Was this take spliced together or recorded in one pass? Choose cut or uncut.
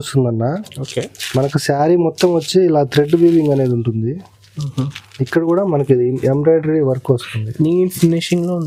uncut